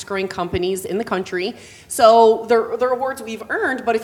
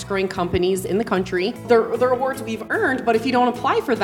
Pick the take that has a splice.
second; 1 cut; at 1.6 s

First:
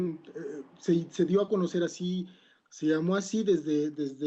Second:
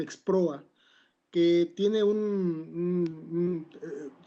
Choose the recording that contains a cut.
second; 1 cut; at 2.1 s

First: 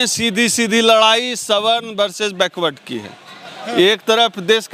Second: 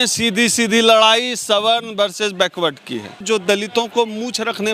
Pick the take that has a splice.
second; 1 cut; at 3.2 s

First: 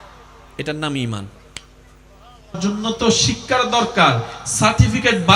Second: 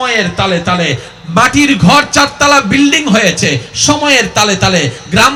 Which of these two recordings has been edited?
first; 1 cut; at 2.6 s

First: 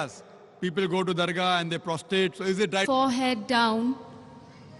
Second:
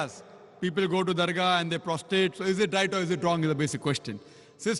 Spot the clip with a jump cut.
second; 1 cut; at 2.8 s

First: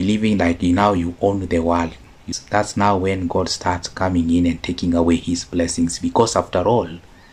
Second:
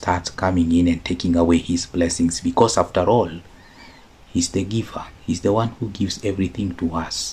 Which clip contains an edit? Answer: first; 1 cut; at 2.2 s

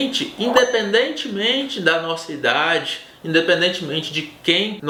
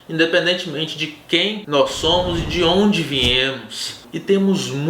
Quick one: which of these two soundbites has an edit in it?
second; 1 cut; at 3.9 s

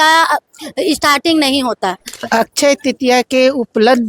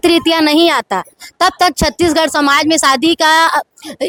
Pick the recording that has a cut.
first; 1 cut; at 2.1 s

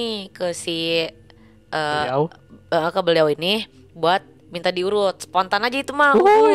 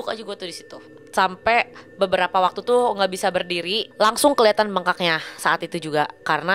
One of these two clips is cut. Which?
second; 2 cuts; at 1.0 s, 3.8 s

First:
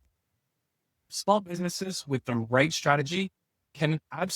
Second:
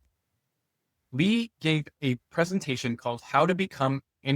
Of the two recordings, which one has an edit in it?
first; 1 cut; at 1.1 s

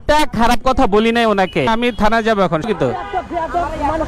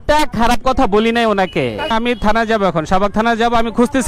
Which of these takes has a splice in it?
first; 2 cuts; at 1.7 s, 2.7 s

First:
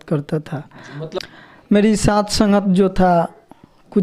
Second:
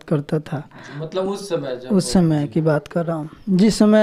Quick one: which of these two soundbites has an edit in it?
first; 1 cut; at 1.2 s

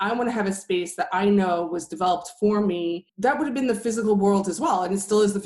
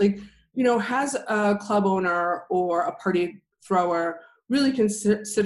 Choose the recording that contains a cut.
first; 1 cut; at 3.1 s

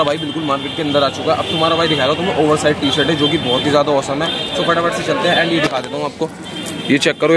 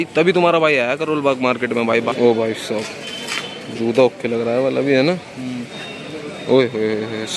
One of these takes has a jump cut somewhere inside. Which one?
second; 2 cuts; at 2.1 s, 5.7 s

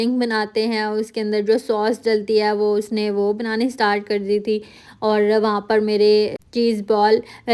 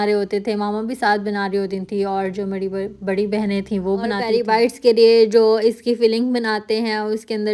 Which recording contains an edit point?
second; 1 cut; at 4.2 s

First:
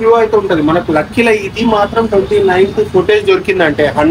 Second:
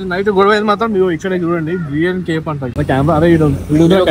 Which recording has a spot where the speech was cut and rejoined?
second; 1 cut; at 2.7 s

